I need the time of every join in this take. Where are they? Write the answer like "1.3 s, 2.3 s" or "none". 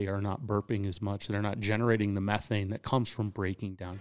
none